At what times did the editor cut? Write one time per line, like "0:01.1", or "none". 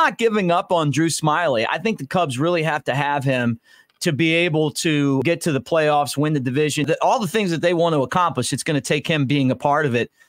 0:05.2
0:06.9

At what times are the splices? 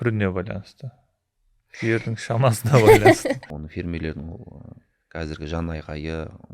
0:03.6

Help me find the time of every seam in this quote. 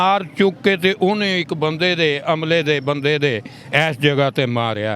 none

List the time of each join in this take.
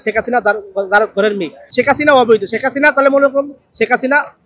0:01.6

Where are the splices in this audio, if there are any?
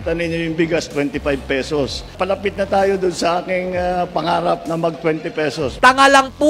0:02.1
0:05.8

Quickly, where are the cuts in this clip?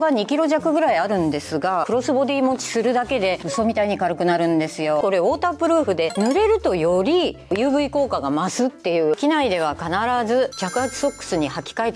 0:01.9
0:05.0
0:06.1
0:09.1

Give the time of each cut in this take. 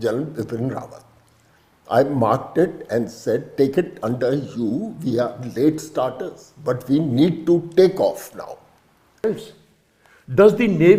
0:09.2

